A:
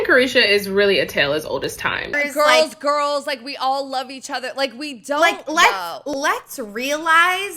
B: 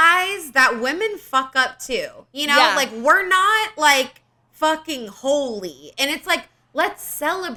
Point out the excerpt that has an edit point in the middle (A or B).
A